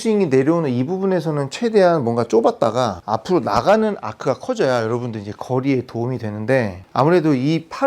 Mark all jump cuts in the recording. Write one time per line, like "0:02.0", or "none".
0:03.0
0:06.8